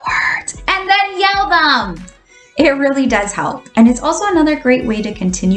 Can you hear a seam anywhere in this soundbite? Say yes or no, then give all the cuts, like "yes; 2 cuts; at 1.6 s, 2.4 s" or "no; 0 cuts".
no; 0 cuts